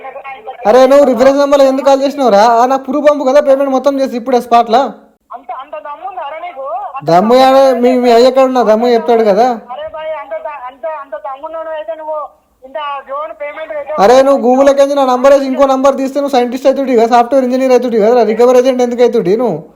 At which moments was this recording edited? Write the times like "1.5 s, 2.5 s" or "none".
none